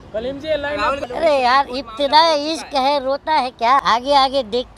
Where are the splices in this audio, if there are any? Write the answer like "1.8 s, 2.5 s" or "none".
1.0 s, 3.8 s